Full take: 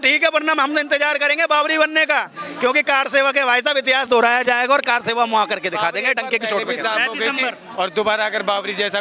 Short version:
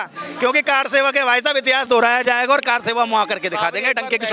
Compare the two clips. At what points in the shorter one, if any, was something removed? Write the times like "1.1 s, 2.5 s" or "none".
none